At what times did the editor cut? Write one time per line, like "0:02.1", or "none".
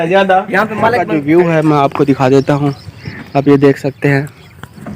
0:01.0